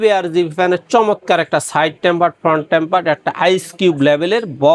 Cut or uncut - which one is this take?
uncut